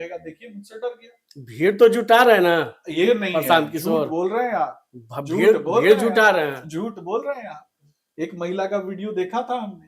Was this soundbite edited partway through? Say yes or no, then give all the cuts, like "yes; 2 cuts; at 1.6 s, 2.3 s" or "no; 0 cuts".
no; 0 cuts